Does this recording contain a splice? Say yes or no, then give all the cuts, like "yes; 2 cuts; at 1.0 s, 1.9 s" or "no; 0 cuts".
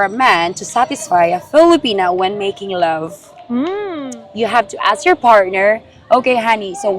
yes; 1 cut; at 4.1 s